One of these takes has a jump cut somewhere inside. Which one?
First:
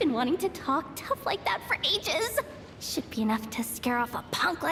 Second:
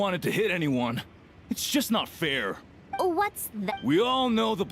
second; 2 cuts; at 2.8 s, 3.7 s

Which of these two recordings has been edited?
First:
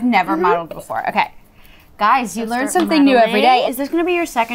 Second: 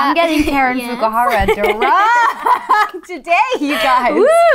first; 1 cut; at 3.6 s

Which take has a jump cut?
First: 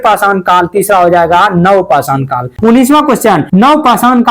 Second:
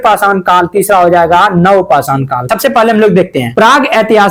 first; 2 cuts; at 2.5 s, 3.4 s

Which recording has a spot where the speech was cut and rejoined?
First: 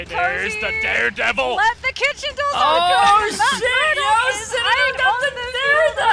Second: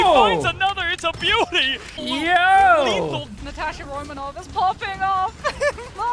second; 2 cuts; at 2.0 s, 3.3 s

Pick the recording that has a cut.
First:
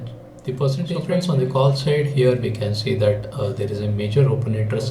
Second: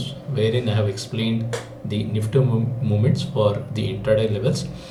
first; 1 cut; at 1.0 s

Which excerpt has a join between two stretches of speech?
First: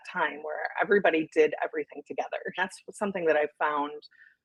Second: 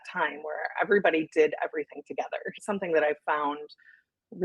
second; 1 cut; at 2.5 s

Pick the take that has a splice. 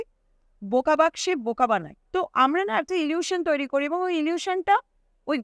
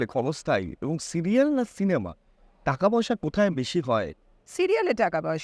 first; 1 cut; at 2.0 s

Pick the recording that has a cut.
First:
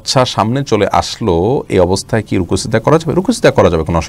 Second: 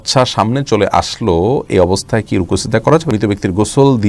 second; 1 cut; at 3.1 s

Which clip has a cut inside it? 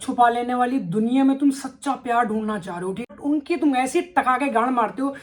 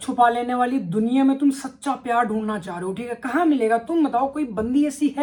first; 1 cut; at 3.1 s

